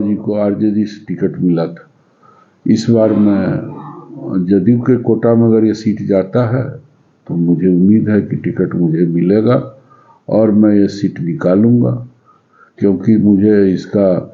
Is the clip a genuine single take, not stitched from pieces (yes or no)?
yes